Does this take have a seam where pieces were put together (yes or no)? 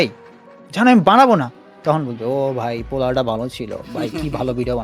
no